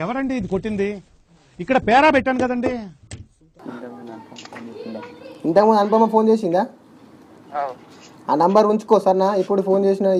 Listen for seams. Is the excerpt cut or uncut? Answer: uncut